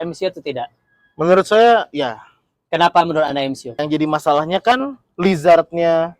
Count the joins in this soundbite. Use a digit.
1